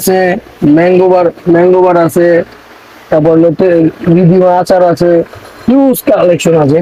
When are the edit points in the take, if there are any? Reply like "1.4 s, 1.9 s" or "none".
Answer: none